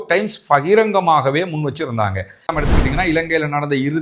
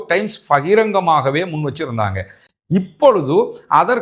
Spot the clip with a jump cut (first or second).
first